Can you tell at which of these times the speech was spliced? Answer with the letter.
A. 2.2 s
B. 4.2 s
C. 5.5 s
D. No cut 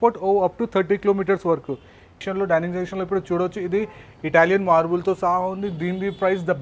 A